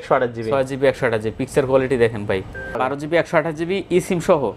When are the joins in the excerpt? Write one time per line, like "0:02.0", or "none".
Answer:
0:02.8